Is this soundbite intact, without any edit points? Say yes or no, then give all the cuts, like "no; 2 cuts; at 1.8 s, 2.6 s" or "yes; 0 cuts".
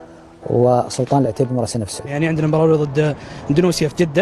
no; 1 cut; at 2.1 s